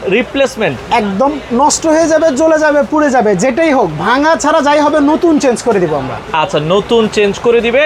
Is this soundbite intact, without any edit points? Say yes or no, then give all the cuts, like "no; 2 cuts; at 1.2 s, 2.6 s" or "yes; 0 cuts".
yes; 0 cuts